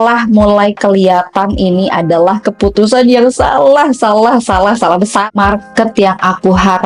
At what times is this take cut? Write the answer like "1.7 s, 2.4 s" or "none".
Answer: 5.3 s